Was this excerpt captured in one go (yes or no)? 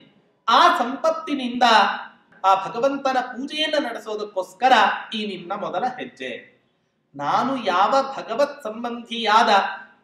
no